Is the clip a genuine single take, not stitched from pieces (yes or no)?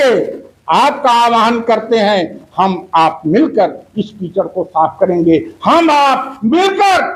yes